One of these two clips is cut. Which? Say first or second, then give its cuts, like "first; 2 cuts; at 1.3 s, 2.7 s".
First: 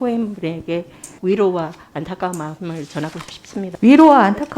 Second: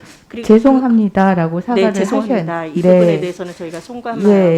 first; 2 cuts; at 1.0 s, 3.7 s